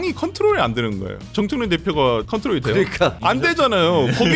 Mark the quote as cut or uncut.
cut